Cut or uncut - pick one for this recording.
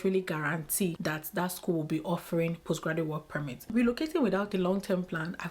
cut